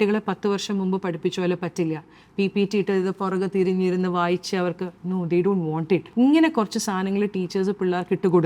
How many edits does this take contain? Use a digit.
1